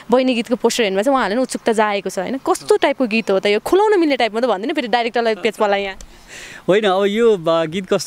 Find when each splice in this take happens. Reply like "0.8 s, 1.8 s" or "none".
none